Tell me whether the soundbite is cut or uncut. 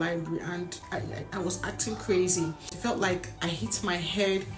cut